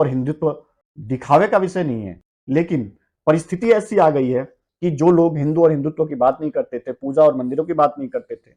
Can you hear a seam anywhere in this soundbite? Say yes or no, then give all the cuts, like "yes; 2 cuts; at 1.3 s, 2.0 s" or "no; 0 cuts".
no; 0 cuts